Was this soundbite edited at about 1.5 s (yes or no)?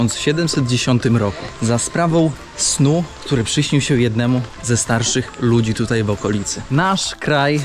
no